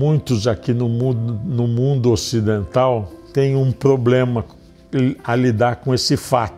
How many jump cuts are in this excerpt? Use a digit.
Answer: 1